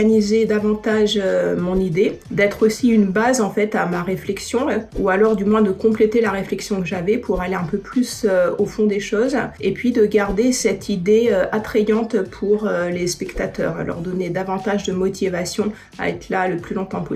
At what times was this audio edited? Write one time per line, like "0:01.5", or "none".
none